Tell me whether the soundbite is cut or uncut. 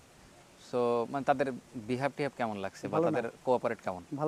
uncut